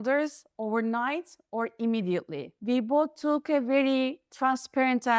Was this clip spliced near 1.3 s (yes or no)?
no